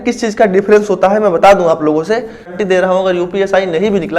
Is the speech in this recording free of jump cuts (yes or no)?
no